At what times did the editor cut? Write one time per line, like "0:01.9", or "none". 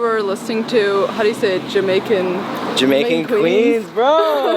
none